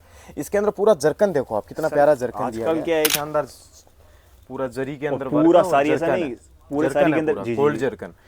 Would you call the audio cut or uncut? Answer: cut